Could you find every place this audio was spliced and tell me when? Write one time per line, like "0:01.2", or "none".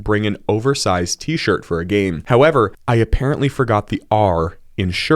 0:02.8